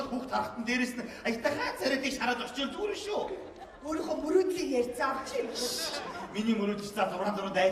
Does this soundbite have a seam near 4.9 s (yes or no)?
no